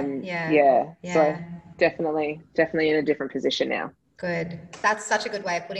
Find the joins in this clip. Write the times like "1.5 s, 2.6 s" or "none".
4.7 s